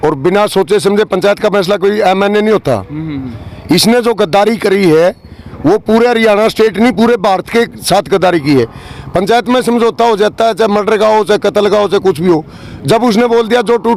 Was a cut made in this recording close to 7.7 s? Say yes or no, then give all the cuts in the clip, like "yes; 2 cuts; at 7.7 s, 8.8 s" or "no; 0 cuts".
no; 0 cuts